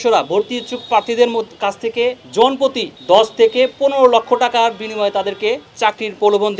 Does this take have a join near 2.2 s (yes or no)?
yes